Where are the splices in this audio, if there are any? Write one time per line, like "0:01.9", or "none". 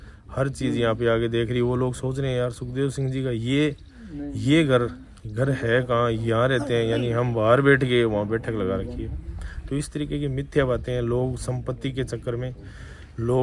none